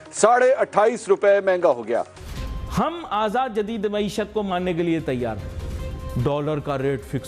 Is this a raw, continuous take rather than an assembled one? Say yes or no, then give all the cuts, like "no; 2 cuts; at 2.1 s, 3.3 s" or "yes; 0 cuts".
no; 1 cut; at 2.2 s